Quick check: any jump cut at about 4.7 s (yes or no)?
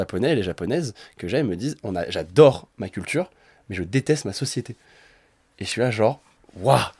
no